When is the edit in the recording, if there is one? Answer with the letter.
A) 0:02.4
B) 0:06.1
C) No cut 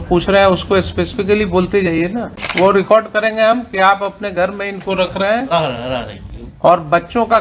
A